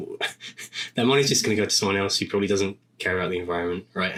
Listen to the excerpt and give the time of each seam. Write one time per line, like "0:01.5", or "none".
none